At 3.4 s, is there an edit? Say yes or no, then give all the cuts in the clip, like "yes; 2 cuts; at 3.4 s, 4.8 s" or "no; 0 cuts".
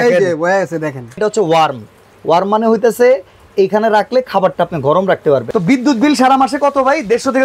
no; 2 cuts; at 1.2 s, 5.5 s